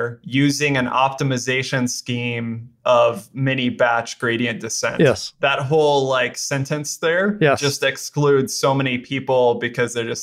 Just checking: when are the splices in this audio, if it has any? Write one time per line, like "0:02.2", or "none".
0:07.5